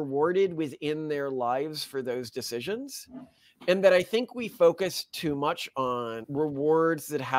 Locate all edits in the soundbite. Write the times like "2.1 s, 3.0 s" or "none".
6.2 s